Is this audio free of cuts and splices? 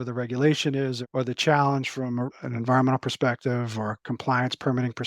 no; 2 cuts; at 1.0 s, 2.3 s

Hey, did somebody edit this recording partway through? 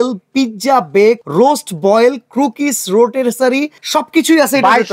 yes; 2 cuts; at 1.2 s, 3.8 s

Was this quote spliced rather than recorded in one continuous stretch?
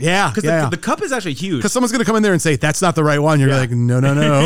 no; 0 cuts

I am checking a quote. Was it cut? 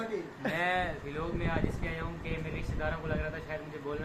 no; 0 cuts

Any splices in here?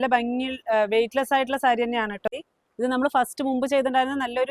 yes; 1 cut; at 2.3 s

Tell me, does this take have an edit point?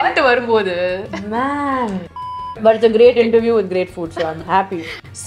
yes; 1 cut; at 2.5 s

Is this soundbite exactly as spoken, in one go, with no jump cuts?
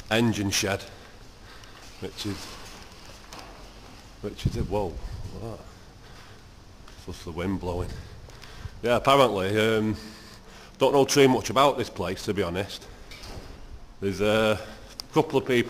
yes; 0 cuts

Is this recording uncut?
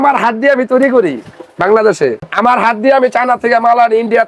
yes; 0 cuts

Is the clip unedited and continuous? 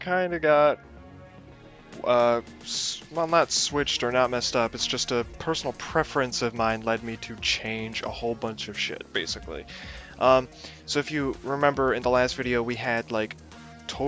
yes; 0 cuts

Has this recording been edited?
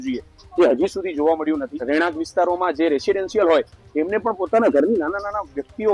yes; 1 cut; at 1.8 s

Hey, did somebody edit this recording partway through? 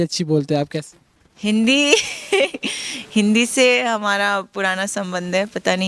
no; 0 cuts

